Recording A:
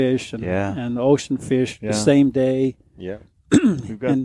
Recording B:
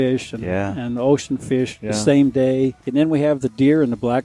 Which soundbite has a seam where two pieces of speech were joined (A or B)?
B